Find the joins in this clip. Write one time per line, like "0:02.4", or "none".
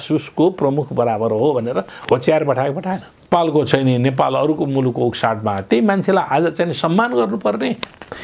0:03.3